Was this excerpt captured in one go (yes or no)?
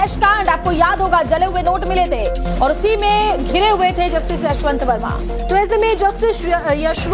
yes